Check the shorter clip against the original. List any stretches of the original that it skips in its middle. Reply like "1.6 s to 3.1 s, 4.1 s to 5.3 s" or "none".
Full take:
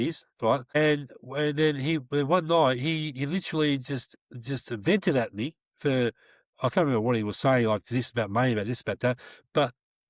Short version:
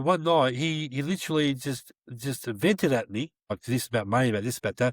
5.8 s to 7.8 s